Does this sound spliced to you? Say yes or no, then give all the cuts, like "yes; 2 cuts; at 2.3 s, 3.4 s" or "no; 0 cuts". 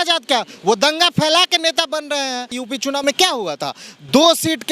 yes; 1 cut; at 2.6 s